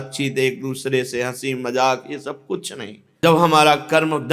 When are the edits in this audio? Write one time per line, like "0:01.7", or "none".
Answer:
0:03.0